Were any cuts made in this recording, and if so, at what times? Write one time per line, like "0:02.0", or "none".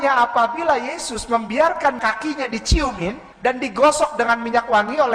0:02.0
0:03.3

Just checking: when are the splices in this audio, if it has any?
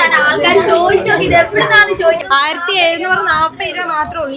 0:02.2

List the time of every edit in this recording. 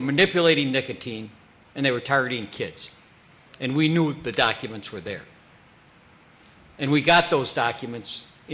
0:06.0

